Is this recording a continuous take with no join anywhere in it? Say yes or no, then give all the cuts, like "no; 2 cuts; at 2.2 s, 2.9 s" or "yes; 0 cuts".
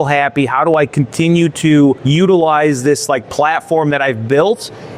no; 1 cut; at 2.0 s